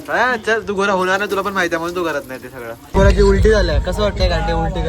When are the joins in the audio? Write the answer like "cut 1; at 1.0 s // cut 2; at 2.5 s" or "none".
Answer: cut 1; at 2.8 s